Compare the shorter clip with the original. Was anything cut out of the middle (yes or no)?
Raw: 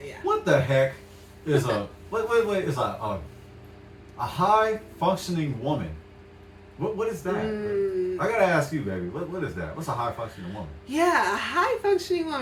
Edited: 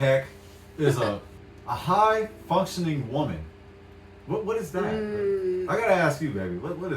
yes